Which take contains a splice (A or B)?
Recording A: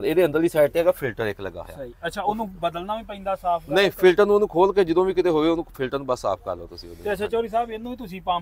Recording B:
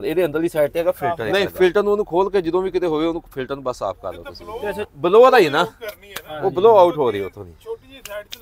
B